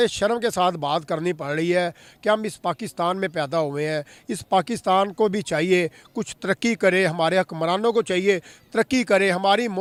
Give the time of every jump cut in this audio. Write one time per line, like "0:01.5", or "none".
none